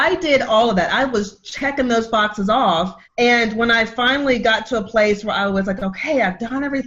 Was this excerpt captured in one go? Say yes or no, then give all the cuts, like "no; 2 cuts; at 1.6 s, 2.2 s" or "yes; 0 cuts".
no; 1 cut; at 3.0 s